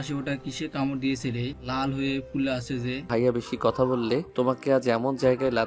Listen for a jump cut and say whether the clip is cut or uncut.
cut